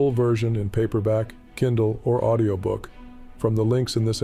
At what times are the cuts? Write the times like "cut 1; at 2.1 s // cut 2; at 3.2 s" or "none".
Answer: none